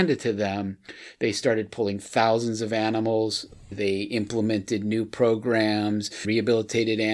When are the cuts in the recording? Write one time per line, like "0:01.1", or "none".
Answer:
0:03.7
0:06.2